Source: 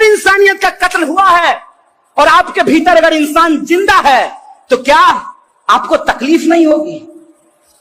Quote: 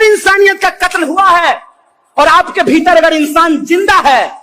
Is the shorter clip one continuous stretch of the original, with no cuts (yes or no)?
yes